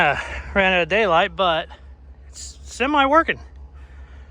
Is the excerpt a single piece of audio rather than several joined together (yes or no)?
yes